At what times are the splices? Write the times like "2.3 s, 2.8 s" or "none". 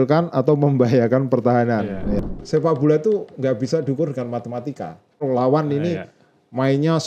2.3 s, 5.2 s